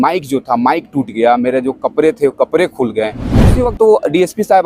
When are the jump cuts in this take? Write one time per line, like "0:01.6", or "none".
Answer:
0:03.5